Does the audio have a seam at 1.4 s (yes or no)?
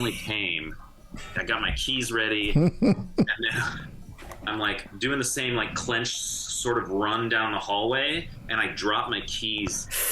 yes